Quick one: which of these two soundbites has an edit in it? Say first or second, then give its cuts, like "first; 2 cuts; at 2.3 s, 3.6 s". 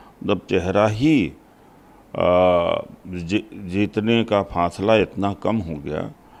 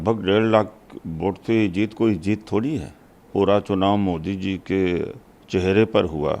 second; 1 cut; at 3.3 s